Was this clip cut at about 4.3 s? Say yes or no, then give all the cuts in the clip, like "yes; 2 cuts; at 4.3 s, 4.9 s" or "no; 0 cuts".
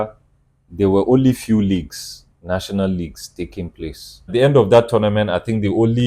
yes; 1 cut; at 4.3 s